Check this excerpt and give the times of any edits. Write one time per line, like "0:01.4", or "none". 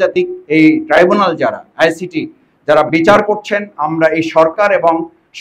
none